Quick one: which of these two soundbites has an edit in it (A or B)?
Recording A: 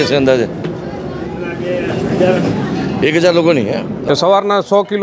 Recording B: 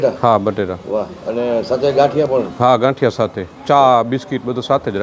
A